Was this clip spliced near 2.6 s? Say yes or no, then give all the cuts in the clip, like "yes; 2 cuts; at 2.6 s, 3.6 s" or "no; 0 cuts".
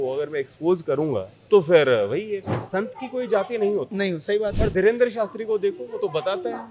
yes; 2 cuts; at 1.3 s, 2.6 s